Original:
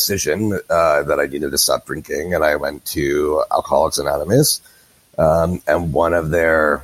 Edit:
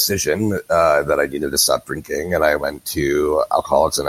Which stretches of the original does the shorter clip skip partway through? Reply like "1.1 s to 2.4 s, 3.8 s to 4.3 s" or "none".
none